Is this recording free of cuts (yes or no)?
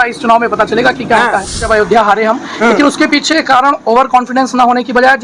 no